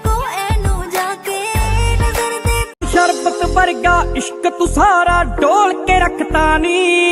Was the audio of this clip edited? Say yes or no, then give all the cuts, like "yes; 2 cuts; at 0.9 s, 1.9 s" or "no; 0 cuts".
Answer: yes; 1 cut; at 2.7 s